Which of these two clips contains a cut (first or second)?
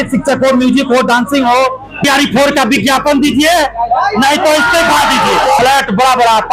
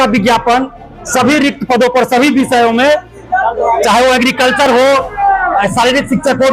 first